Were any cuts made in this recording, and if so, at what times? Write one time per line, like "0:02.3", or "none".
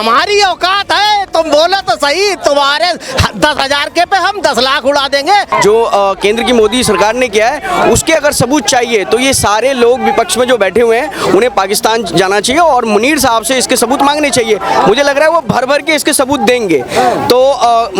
0:05.5